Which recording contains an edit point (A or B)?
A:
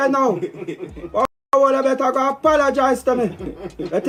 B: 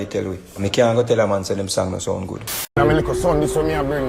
B